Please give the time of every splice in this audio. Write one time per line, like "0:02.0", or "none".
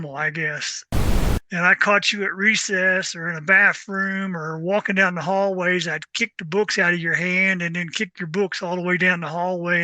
0:01.0